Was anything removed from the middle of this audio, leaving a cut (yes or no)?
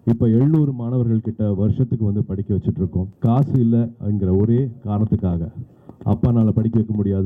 yes